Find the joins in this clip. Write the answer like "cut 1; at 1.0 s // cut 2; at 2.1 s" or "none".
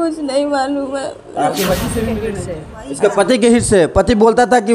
cut 1; at 2.4 s